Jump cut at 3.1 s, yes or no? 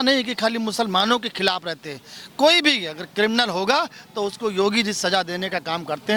no